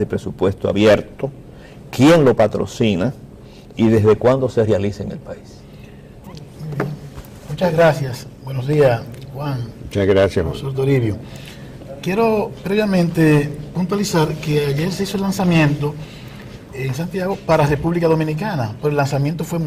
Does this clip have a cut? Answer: yes; 1 cut; at 13.1 s

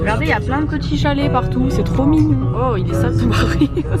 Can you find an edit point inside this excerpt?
no; 0 cuts

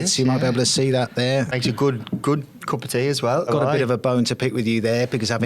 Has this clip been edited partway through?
yes; 2 cuts; at 1.5 s, 3.5 s

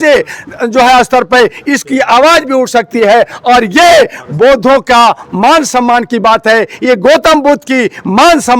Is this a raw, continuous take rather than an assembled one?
yes; 0 cuts

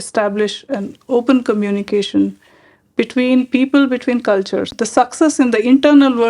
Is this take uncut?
no; 1 cut; at 4.7 s

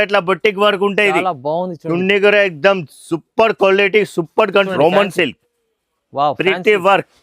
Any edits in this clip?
yes; 1 cut; at 4.7 s

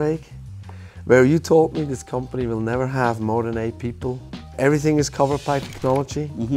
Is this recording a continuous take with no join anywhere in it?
no; 1 cut; at 4.5 s

